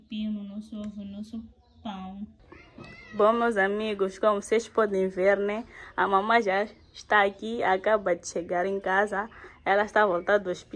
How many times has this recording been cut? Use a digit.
1